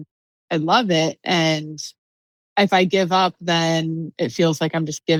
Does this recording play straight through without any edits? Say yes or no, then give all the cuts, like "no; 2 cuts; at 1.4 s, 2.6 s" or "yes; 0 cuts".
yes; 0 cuts